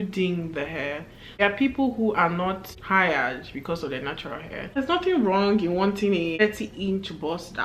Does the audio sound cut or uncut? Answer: cut